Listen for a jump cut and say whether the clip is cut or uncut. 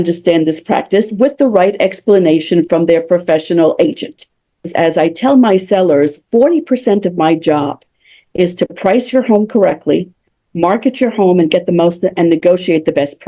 cut